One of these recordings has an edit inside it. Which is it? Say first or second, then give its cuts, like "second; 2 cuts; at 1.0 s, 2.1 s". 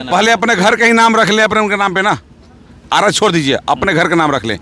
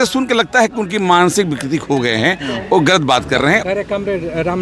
second; 1 cut; at 3.6 s